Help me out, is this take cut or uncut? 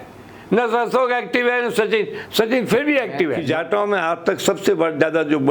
cut